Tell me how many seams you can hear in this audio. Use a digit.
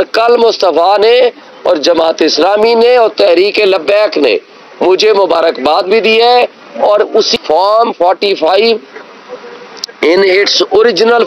1